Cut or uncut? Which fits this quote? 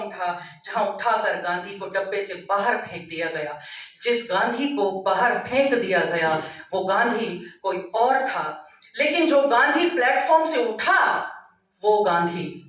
uncut